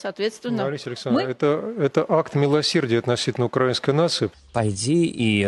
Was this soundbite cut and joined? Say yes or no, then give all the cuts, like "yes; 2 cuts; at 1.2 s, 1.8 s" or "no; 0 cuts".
yes; 1 cut; at 4.4 s